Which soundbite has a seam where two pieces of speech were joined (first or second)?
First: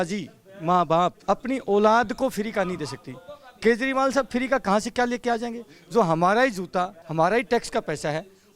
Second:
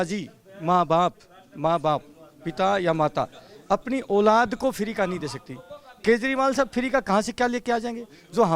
first